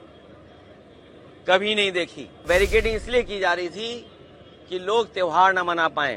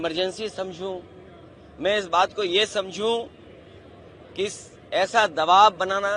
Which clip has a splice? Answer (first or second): first